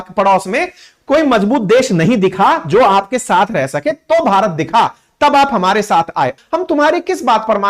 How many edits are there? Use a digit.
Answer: 1